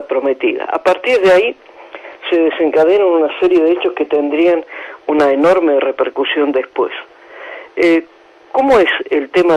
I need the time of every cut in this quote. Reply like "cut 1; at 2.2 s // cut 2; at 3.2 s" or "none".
none